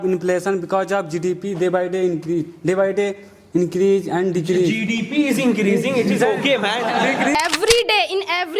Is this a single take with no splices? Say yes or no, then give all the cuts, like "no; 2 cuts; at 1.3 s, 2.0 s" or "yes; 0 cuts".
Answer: no; 1 cut; at 7.4 s